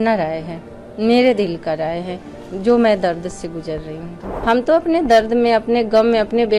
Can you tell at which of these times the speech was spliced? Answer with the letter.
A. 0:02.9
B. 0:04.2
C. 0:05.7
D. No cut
B